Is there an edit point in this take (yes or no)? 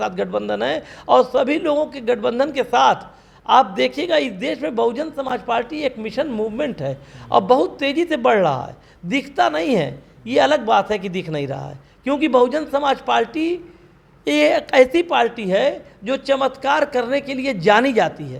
no